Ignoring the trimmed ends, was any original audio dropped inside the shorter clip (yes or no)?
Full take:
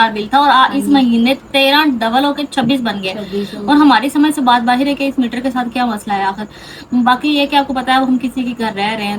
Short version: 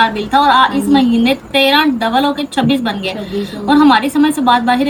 no